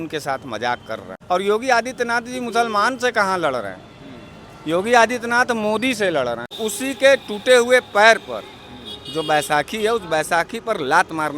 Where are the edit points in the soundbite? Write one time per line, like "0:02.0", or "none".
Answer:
0:01.2
0:06.6